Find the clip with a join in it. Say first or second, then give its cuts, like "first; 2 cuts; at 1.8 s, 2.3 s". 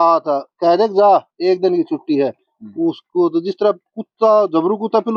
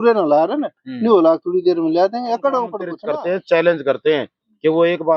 second; 1 cut; at 2.9 s